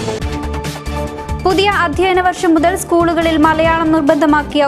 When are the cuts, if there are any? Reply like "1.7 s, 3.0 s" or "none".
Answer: 1.1 s